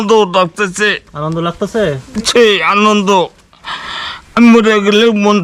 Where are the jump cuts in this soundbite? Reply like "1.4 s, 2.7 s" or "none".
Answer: none